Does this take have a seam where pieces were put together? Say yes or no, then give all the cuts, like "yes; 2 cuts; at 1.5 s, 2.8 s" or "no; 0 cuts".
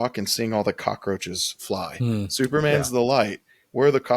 no; 0 cuts